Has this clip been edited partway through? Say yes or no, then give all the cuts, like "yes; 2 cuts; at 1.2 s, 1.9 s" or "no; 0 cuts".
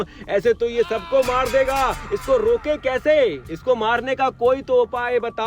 no; 0 cuts